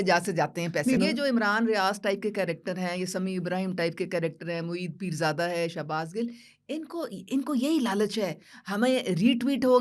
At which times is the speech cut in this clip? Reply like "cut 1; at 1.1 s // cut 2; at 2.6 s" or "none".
cut 1; at 1.0 s